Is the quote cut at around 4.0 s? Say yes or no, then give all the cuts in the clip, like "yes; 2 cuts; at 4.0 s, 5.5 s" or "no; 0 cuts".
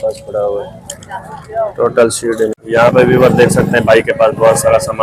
no; 1 cut; at 2.6 s